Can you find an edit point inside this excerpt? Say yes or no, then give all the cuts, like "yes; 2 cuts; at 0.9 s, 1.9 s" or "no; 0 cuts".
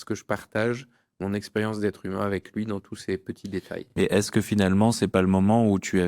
no; 0 cuts